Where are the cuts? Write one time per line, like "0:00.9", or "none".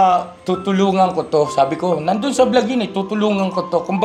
none